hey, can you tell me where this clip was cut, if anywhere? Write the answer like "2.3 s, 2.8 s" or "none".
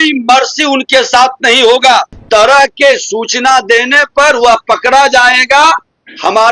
2.2 s